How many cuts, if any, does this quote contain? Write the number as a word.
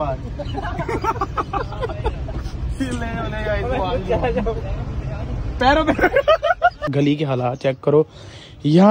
one